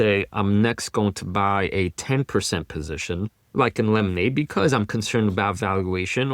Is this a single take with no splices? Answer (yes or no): no